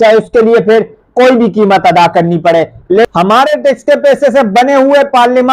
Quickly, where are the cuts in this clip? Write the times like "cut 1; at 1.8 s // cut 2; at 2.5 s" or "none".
cut 1; at 3.1 s